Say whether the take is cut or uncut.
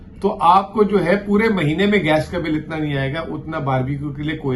uncut